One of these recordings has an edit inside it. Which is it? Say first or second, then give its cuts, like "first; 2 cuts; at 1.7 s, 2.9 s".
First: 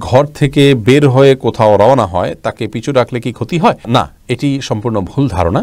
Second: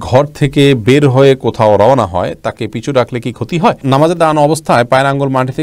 second; 1 cut; at 3.8 s